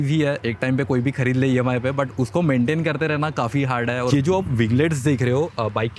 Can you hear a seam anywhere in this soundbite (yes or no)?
yes